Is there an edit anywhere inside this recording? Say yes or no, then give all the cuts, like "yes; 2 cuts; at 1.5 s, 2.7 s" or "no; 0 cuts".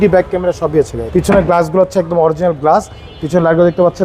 yes; 1 cut; at 1.0 s